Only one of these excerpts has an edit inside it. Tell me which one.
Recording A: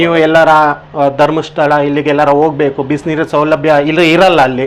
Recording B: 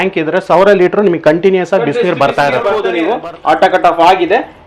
B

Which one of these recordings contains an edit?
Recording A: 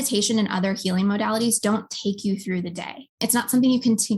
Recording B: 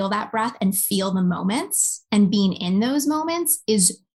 A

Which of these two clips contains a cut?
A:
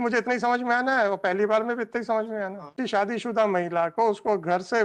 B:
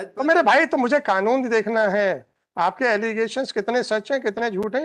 A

